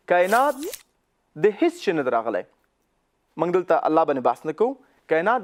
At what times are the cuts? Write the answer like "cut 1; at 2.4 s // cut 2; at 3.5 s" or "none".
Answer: none